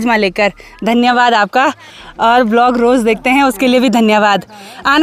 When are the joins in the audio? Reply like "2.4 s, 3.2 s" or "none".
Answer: none